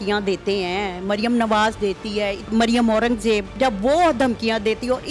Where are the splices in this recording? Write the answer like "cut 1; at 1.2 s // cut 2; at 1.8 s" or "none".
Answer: cut 1; at 2.5 s // cut 2; at 3.5 s